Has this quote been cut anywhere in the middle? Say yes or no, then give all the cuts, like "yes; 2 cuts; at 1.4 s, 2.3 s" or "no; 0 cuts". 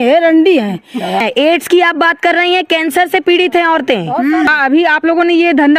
yes; 2 cuts; at 1.2 s, 4.5 s